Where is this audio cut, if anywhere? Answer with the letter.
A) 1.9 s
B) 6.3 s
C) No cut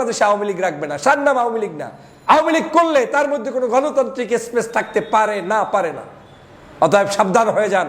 C